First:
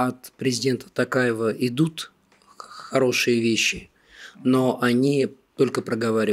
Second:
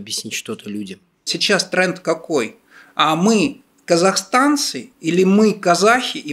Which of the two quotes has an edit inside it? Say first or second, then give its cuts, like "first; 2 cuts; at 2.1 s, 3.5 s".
second; 1 cut; at 1.3 s